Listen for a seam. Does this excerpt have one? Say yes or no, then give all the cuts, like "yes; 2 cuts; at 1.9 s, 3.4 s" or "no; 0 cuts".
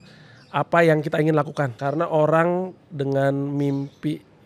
yes; 1 cut; at 1.7 s